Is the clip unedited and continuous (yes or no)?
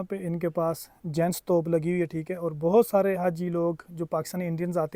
yes